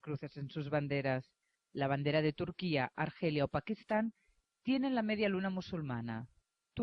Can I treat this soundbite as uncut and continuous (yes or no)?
no